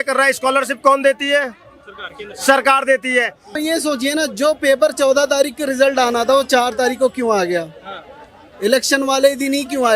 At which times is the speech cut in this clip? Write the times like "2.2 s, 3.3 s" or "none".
3.6 s

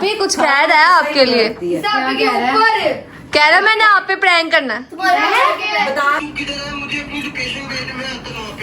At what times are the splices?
6.2 s

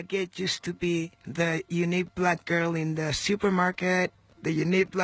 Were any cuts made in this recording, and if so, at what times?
1.2 s

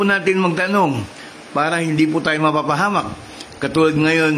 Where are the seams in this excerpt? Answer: none

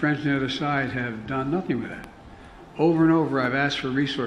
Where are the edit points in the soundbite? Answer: none

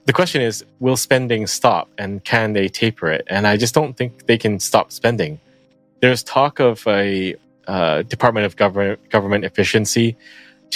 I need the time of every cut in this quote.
none

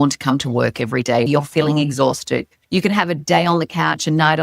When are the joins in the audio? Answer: 1.3 s

